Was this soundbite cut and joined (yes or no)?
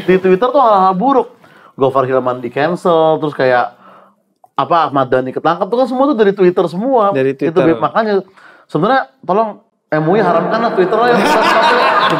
no